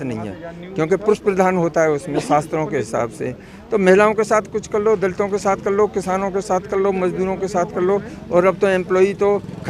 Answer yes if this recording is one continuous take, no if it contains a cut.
yes